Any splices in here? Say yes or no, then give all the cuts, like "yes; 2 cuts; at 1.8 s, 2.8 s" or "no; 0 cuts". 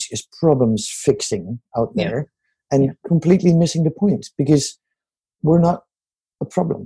no; 0 cuts